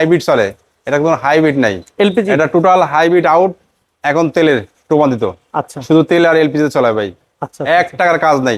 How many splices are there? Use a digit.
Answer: 0